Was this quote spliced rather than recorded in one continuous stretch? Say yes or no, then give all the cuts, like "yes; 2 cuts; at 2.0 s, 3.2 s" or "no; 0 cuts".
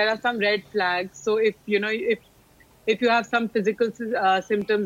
no; 0 cuts